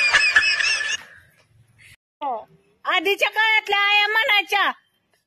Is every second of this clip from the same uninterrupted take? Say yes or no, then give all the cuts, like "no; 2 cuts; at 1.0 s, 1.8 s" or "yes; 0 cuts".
yes; 0 cuts